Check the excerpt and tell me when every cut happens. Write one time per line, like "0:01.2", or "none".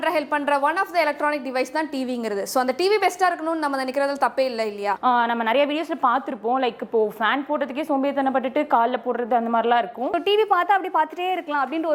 0:05.0
0:10.1